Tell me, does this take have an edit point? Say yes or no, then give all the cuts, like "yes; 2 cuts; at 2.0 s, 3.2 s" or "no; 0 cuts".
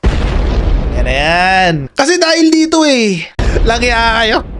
yes; 2 cuts; at 1.9 s, 3.3 s